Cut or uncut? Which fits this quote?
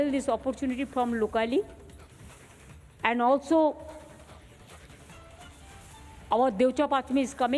cut